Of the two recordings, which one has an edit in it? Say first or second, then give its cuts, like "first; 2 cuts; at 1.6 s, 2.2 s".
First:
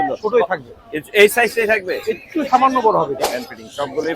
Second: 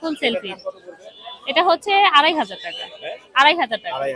first; 1 cut; at 3.2 s